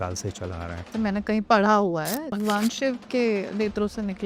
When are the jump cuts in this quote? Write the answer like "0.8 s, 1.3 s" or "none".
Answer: 0.9 s, 2.3 s